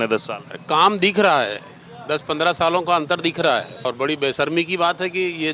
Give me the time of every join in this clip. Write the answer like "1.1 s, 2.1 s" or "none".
3.8 s